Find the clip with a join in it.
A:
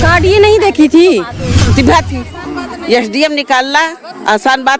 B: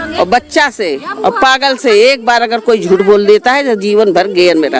A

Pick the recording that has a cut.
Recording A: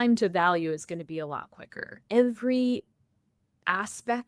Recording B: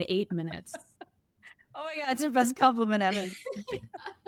A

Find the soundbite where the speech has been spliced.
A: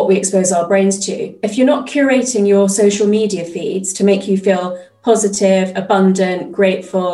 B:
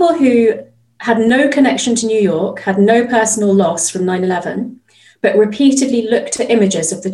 B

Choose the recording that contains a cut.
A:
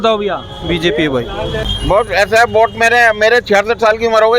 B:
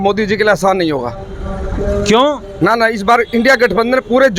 A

